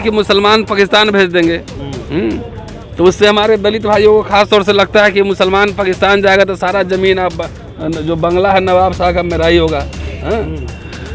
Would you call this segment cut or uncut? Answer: uncut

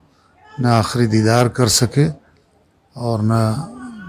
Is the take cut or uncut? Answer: uncut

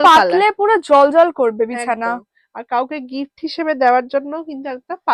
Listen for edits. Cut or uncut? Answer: uncut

